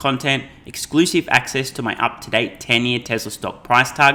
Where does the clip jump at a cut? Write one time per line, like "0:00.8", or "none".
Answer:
none